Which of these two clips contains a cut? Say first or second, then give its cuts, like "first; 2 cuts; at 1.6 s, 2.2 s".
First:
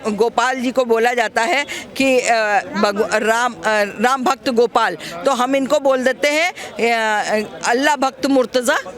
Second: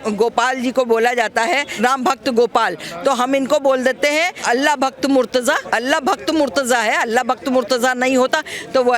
second; 3 cuts; at 1.7 s, 4.4 s, 5.6 s